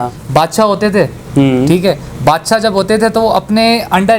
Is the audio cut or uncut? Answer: uncut